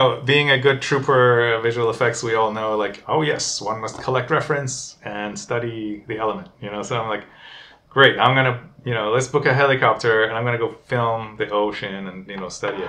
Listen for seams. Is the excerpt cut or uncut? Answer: uncut